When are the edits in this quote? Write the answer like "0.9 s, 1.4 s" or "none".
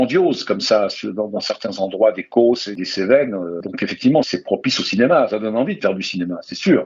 2.7 s